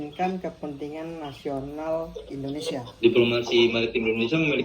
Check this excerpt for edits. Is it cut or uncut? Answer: cut